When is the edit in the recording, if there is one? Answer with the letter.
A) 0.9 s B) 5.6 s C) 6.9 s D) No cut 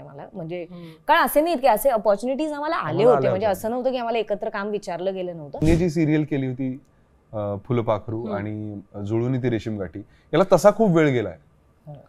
B